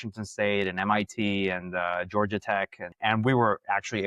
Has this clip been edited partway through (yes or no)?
yes